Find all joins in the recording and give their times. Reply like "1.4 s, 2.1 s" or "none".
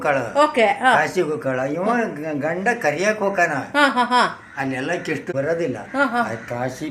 5.3 s